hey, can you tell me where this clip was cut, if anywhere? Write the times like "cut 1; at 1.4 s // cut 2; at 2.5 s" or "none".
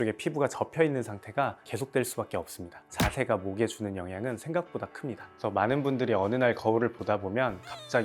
cut 1; at 2.9 s // cut 2; at 5.3 s